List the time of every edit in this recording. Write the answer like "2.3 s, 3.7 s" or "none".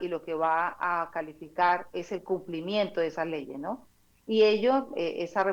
none